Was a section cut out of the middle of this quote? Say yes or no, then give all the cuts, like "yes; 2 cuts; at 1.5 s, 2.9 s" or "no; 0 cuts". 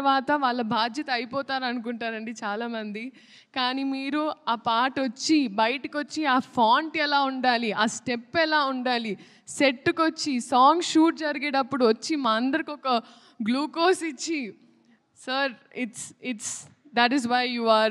no; 0 cuts